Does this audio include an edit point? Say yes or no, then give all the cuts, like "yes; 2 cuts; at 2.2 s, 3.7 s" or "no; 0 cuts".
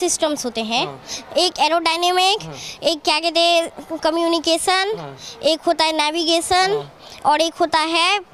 no; 0 cuts